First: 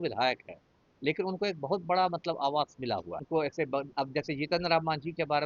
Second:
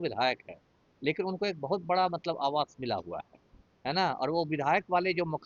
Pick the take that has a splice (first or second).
first